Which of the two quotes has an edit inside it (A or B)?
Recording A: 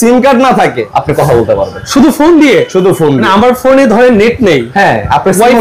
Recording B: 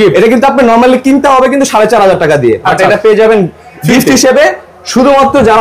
A